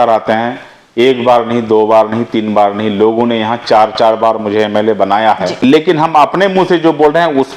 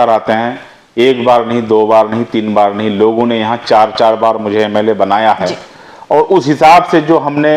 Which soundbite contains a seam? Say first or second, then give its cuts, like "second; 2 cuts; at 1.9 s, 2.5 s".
first; 1 cut; at 5.6 s